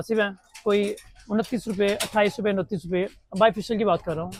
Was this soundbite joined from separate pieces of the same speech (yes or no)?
no